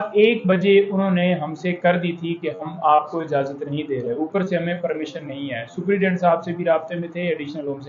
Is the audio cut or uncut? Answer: uncut